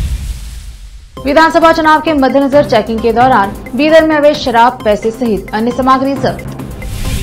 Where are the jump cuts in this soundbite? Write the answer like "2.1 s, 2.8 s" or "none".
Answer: 1.1 s